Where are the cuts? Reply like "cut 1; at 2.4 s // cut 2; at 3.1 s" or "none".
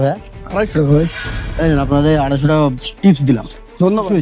none